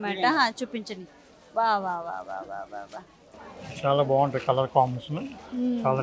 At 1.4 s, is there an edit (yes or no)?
no